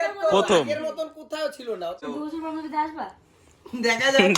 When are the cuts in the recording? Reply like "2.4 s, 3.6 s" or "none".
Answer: 2.0 s